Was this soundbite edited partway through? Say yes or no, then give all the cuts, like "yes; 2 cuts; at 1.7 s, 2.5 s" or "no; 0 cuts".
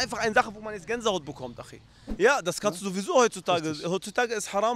yes; 1 cut; at 2.0 s